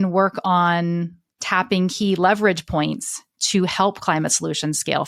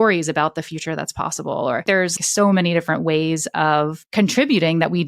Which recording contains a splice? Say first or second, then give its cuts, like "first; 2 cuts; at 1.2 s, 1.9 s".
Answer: second; 2 cuts; at 2.1 s, 4.0 s